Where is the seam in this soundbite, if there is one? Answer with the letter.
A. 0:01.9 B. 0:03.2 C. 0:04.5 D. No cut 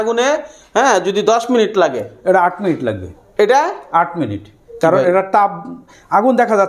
D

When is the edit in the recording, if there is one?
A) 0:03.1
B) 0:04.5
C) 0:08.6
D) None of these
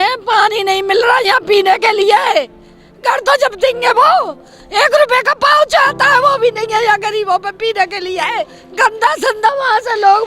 C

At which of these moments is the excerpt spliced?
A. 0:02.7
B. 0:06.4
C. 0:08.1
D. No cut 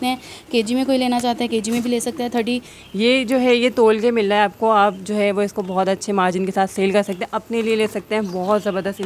A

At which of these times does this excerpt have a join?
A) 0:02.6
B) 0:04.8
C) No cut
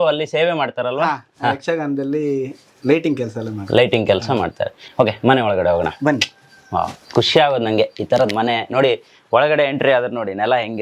C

